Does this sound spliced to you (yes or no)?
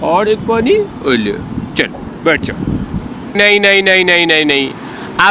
yes